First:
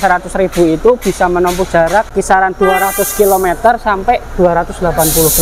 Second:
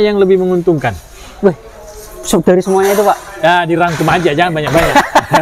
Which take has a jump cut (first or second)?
first